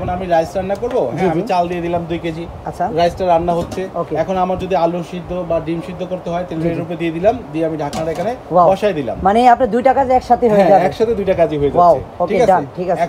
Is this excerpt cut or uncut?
uncut